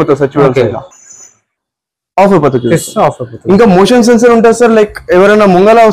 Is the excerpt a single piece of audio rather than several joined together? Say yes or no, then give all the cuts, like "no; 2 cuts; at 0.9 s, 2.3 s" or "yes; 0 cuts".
yes; 0 cuts